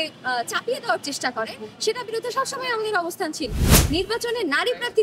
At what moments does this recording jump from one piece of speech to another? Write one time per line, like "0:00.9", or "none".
0:03.7